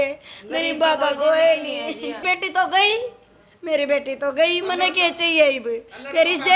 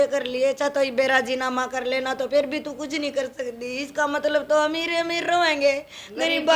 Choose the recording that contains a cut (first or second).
first